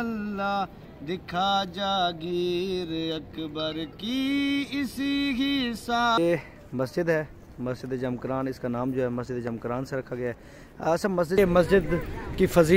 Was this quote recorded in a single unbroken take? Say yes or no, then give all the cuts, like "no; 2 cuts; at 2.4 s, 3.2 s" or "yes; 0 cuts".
no; 2 cuts; at 6.2 s, 11.4 s